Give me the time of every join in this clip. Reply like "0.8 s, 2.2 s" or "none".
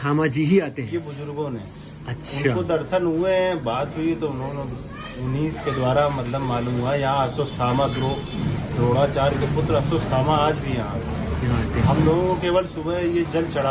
none